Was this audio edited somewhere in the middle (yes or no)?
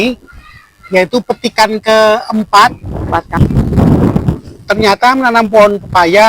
yes